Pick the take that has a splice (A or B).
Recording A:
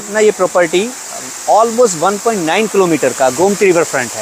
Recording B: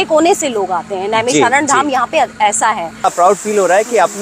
B